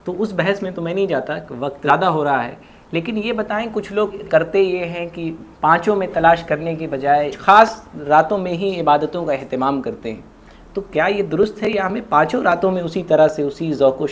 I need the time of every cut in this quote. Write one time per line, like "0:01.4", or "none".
0:01.9
0:04.2
0:07.4